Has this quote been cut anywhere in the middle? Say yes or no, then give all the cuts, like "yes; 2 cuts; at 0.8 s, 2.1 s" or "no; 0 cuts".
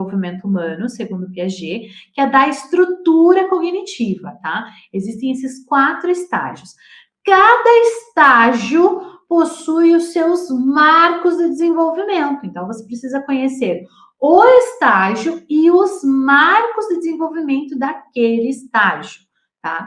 no; 0 cuts